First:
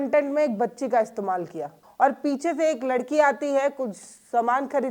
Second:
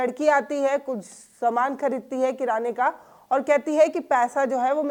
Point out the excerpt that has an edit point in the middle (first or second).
first